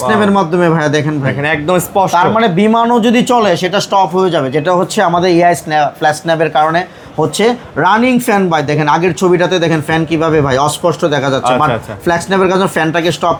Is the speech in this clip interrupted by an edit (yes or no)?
no